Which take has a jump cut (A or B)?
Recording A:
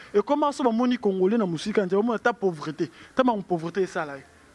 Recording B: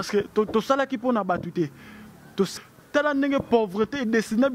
B